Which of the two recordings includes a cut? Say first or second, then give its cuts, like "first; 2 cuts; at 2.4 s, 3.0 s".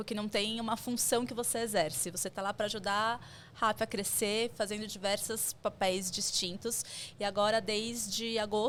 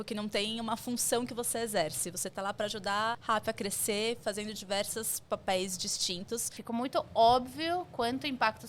second; 2 cuts; at 3.2 s, 6.5 s